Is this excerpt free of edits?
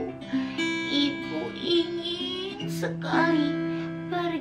yes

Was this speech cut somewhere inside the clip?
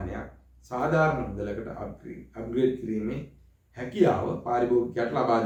no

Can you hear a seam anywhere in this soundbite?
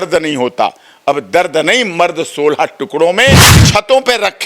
yes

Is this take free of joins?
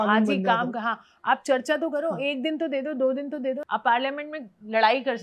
no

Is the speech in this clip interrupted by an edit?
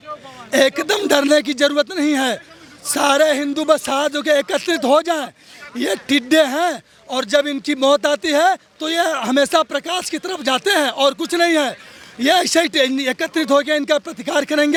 no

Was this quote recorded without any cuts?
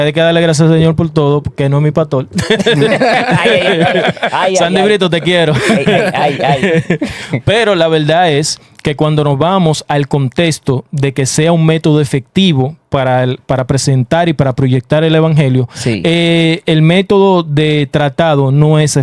yes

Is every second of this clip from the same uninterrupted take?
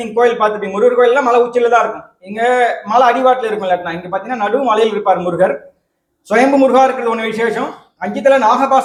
yes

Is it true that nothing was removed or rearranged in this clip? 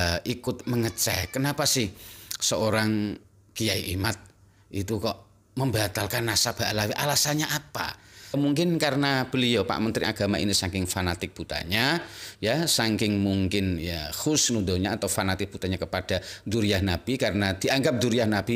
no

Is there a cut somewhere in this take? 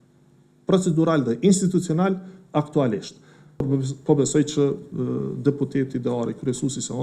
yes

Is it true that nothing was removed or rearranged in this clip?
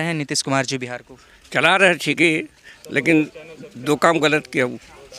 yes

